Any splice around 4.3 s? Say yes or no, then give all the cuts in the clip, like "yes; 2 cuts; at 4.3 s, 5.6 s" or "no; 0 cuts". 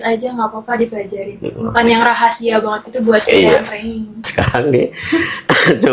yes; 1 cut; at 4.3 s